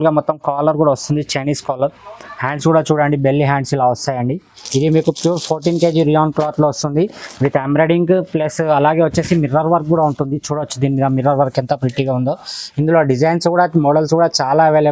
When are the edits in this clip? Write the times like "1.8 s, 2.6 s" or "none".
4.5 s